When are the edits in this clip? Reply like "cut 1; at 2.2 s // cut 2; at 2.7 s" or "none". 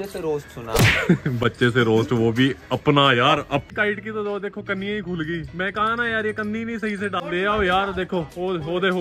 cut 1; at 3.6 s // cut 2; at 7.2 s